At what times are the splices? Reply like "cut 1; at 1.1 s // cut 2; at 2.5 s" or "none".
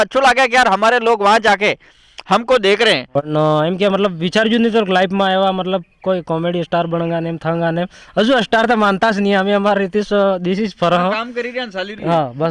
cut 1; at 3.1 s